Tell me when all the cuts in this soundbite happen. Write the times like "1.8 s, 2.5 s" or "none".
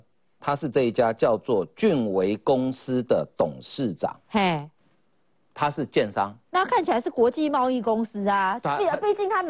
none